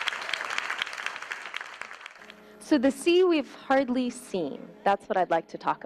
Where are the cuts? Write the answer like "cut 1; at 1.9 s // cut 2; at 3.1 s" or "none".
none